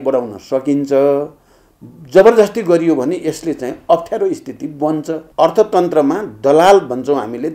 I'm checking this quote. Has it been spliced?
yes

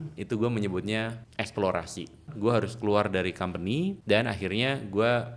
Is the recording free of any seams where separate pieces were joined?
no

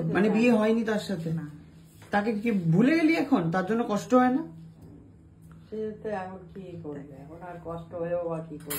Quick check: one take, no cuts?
yes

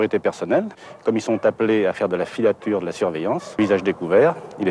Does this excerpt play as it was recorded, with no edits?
no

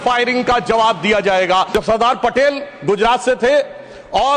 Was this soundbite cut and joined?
yes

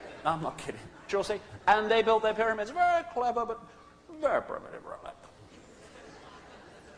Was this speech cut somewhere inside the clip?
no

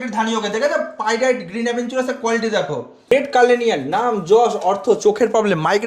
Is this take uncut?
no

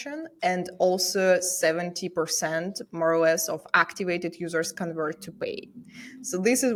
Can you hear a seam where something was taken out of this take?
no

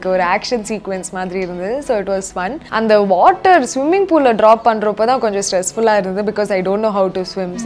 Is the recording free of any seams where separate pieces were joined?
no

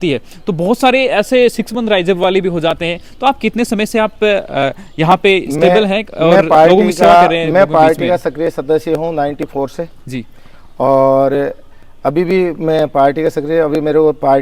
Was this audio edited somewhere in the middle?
no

